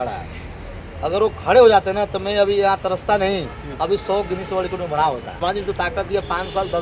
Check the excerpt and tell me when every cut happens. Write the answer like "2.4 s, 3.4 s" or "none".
5.4 s